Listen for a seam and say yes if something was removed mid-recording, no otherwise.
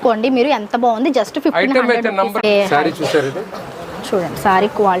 yes